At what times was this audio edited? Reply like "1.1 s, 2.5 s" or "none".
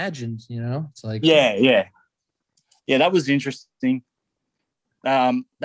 none